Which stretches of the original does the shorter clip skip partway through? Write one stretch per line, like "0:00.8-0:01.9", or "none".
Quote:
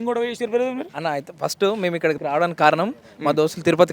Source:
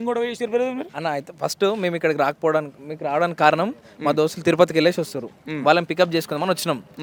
0:02.2-0:03.0